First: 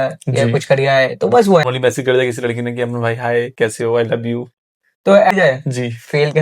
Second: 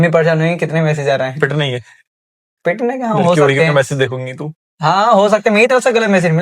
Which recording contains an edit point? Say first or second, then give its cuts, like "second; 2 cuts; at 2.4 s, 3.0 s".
first; 2 cuts; at 1.7 s, 5.3 s